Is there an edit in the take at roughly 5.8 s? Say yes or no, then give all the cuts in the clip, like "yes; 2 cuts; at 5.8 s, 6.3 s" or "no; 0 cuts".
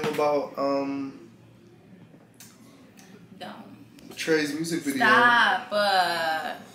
yes; 1 cut; at 5.8 s